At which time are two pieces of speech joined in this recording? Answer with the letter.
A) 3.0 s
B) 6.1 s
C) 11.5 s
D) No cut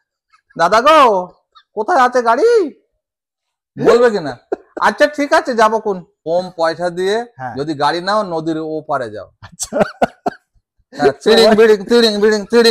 B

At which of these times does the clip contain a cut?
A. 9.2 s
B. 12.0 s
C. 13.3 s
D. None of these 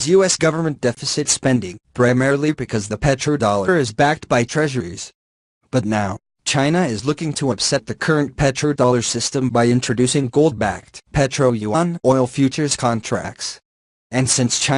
A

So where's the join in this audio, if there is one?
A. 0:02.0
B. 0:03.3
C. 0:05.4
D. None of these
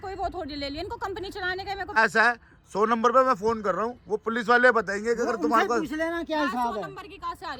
A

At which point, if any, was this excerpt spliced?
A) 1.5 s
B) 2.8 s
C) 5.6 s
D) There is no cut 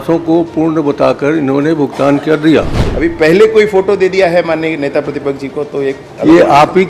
B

